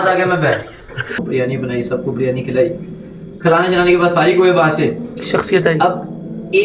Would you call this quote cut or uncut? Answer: cut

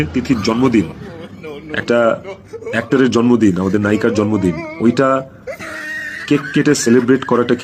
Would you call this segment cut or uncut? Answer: uncut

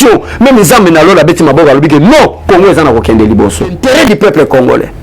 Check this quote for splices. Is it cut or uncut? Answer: cut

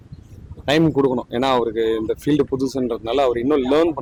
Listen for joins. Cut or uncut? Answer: uncut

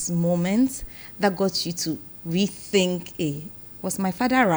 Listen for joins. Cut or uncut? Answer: uncut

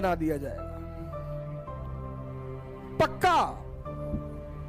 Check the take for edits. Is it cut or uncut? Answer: cut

